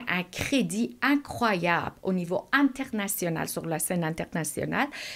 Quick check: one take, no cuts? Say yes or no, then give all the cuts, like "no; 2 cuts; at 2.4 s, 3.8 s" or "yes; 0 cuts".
yes; 0 cuts